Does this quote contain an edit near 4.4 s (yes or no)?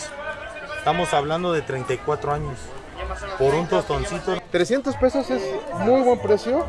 yes